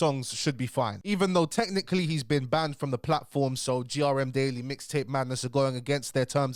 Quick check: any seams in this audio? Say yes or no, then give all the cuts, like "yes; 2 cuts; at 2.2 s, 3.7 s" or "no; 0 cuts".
no; 0 cuts